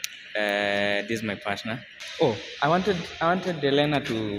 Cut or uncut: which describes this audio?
cut